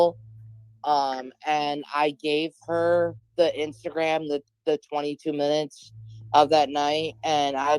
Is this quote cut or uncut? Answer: cut